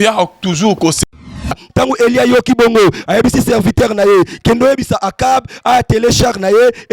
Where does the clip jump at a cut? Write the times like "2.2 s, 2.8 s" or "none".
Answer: 1.4 s